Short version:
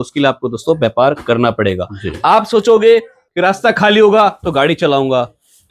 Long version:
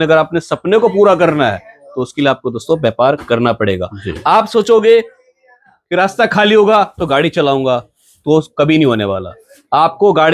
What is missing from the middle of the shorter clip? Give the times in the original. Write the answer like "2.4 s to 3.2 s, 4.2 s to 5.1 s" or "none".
5.2 s to 5.7 s